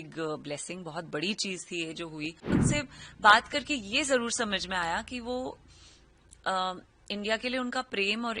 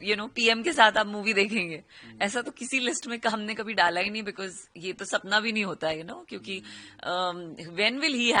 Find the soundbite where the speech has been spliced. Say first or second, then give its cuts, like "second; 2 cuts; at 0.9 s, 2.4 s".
first; 1 cut; at 2.5 s